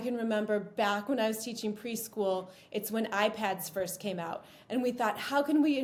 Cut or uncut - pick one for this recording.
uncut